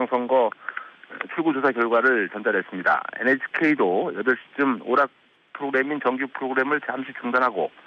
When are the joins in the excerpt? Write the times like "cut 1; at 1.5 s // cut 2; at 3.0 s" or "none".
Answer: cut 1; at 4.5 s